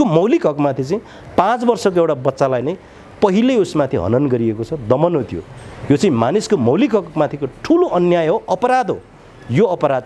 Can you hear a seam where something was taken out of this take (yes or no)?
no